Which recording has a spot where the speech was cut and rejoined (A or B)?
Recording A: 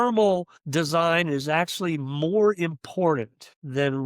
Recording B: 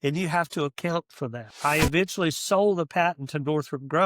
B